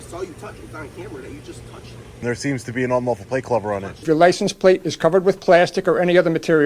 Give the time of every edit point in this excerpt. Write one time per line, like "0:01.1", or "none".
0:02.2
0:03.9